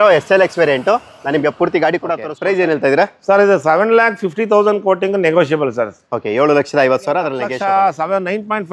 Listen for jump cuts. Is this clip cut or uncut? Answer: cut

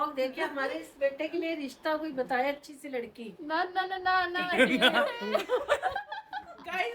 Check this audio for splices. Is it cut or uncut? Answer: uncut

